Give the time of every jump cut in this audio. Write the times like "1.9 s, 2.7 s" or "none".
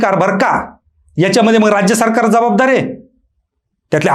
none